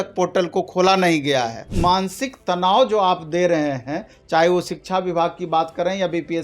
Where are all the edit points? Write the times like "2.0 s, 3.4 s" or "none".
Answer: 1.7 s